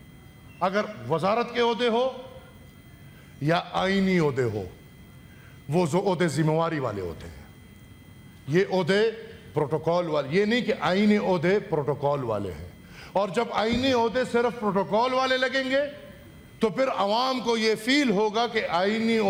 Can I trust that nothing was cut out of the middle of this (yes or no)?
yes